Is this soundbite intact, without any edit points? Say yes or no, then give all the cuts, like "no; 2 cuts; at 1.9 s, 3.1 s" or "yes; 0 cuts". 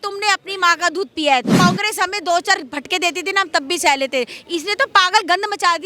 no; 1 cut; at 1.5 s